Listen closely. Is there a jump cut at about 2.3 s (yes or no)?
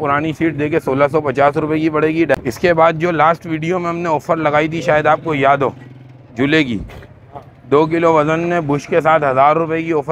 yes